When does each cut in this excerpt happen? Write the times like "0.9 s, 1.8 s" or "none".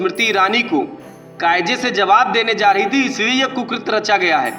none